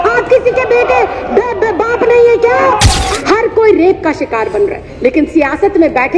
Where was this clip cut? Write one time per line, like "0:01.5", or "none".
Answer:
0:03.0